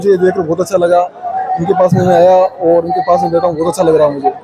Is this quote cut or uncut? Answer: uncut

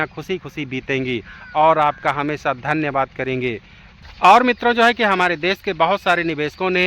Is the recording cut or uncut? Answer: cut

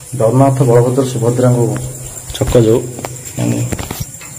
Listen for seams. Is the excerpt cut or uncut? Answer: cut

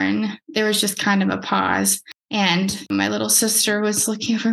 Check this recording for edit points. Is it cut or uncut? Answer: cut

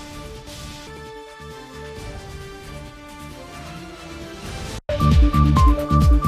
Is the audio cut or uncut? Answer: cut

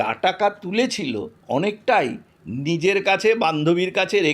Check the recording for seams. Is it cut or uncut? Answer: cut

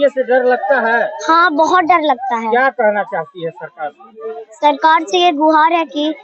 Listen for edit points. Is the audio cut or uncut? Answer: uncut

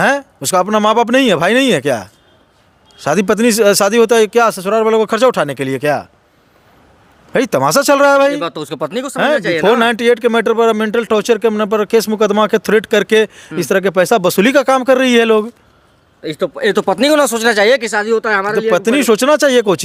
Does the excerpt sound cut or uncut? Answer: uncut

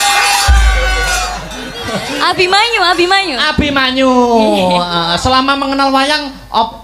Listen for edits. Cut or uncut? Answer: uncut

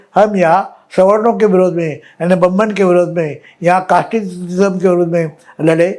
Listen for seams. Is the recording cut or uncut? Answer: uncut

